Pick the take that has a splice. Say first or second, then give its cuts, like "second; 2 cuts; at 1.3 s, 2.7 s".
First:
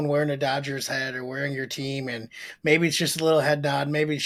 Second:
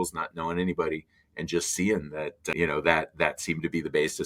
second; 1 cut; at 2.4 s